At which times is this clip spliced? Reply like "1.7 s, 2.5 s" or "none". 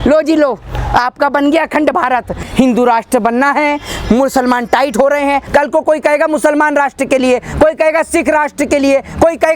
2.4 s, 5.4 s